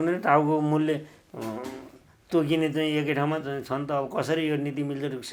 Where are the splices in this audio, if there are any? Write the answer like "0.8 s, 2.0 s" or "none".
none